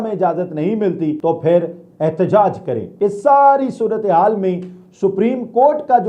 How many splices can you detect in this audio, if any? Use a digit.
2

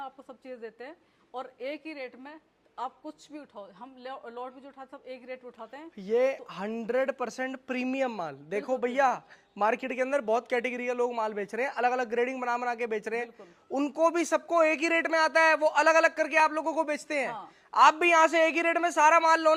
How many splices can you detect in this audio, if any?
0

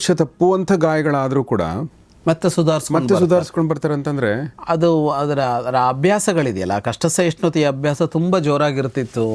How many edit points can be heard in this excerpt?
0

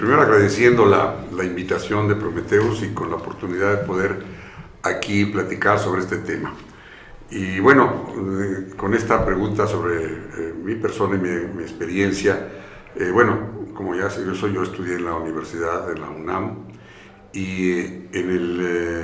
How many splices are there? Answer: 0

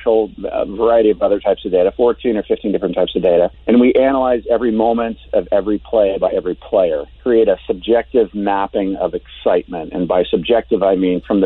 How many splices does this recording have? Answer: 2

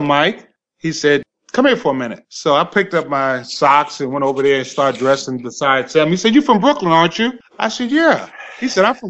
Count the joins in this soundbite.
2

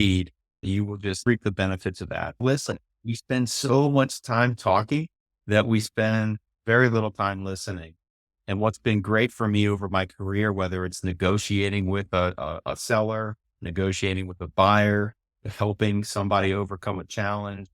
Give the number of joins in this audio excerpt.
2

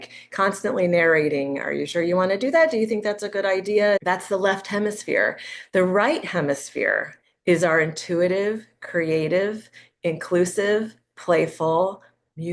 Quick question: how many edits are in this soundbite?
1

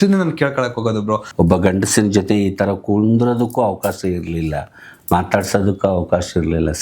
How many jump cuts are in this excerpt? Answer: 1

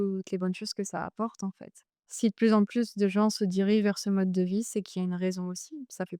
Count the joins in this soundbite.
1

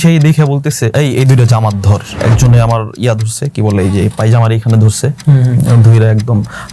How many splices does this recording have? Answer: 2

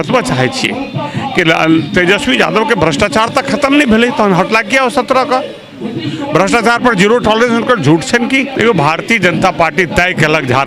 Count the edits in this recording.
1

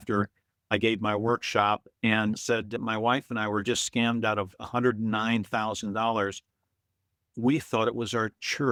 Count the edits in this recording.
0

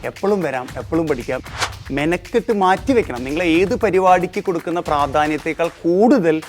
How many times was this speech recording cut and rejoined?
1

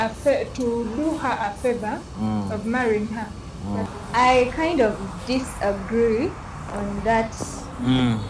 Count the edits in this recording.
1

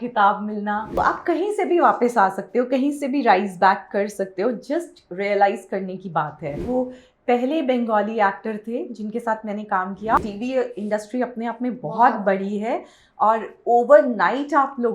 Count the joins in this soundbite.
3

